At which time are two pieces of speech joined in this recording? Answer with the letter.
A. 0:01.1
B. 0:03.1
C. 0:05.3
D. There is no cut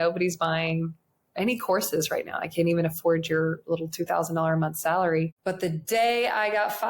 C